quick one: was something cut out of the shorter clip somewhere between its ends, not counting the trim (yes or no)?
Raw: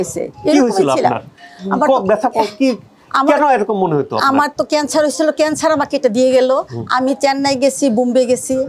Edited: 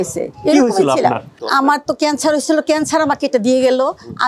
yes